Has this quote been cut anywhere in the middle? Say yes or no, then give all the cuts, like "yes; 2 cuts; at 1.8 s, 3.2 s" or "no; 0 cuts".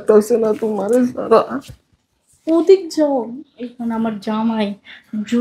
no; 0 cuts